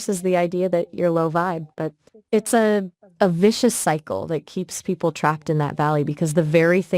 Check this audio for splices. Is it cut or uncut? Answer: cut